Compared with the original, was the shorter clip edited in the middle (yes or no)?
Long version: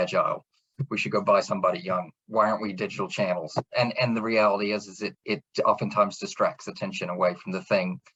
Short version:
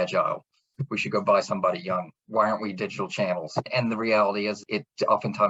yes